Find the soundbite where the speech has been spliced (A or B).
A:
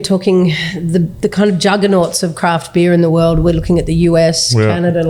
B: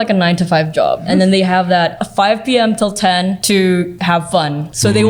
B